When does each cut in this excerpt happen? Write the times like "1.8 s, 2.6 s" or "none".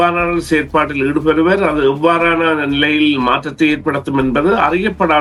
none